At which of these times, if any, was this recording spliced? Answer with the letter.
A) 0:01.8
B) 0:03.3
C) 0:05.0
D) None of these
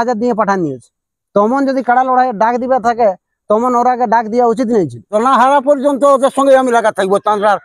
C